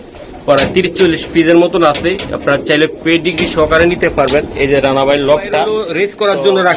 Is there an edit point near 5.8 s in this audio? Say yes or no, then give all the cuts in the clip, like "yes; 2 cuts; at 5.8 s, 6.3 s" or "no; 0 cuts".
yes; 1 cut; at 5.8 s